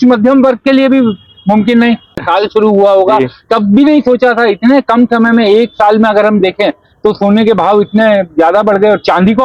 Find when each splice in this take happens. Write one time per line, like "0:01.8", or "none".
0:02.2